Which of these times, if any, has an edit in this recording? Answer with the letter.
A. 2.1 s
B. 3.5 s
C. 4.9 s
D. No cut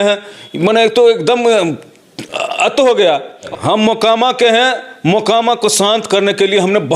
B